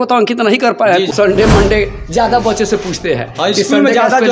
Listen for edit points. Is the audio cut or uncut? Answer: cut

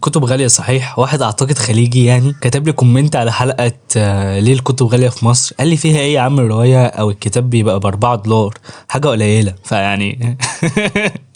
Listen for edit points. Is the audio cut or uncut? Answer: uncut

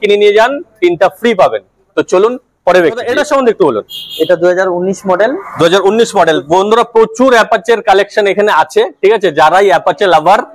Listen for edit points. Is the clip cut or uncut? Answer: uncut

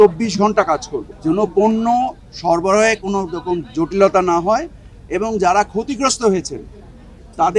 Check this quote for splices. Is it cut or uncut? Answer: uncut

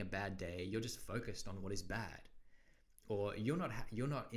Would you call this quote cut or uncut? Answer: uncut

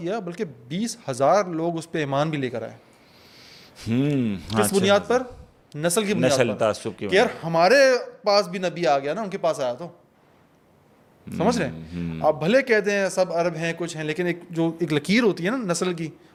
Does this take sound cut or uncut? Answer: uncut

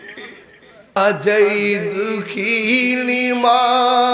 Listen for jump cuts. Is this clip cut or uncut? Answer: cut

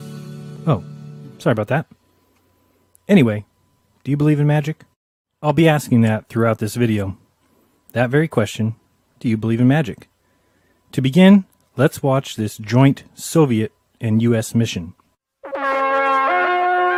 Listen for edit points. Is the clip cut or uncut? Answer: uncut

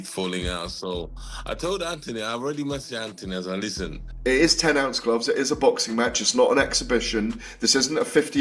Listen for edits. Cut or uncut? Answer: cut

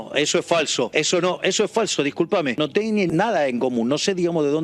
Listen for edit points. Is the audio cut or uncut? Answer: cut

